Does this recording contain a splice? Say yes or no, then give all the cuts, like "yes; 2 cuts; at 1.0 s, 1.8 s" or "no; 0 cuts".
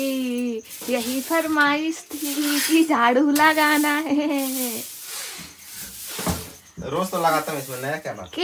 no; 0 cuts